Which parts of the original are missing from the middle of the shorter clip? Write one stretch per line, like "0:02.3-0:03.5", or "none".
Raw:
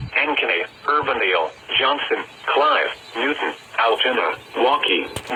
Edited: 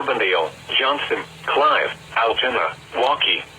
0:03.0-0:03.6